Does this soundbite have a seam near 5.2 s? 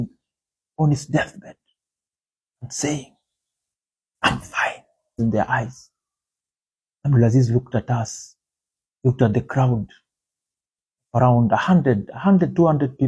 yes; 1 cut; at 5.2 s

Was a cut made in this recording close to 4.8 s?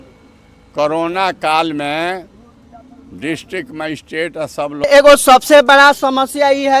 yes; 1 cut; at 4.8 s

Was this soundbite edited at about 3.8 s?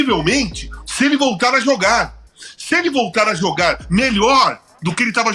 no; 0 cuts

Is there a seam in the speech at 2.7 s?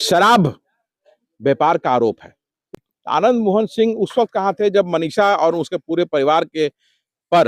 yes; 1 cut; at 2.7 s

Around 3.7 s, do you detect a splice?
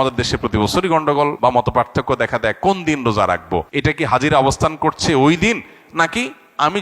yes; 2 cuts; at 1.4 s, 3.7 s

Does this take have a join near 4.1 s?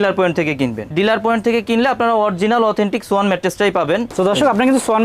yes; 2 cuts; at 0.8 s, 4.1 s

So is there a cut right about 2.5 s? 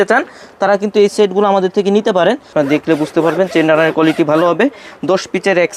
yes; 1 cut; at 2.5 s

